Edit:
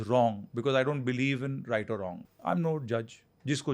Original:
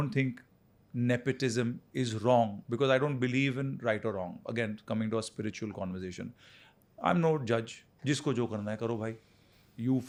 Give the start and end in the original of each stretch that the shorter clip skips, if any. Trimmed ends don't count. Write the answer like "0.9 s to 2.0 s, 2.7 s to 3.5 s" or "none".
4.4 s to 6.8 s